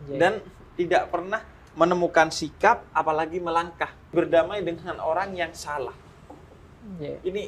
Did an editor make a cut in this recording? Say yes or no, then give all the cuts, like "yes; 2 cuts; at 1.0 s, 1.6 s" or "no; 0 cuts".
yes; 1 cut; at 4.1 s